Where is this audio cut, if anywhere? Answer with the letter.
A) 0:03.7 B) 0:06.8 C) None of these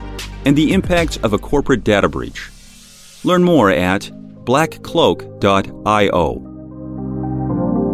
B